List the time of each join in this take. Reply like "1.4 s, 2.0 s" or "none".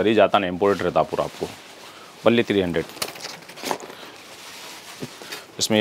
none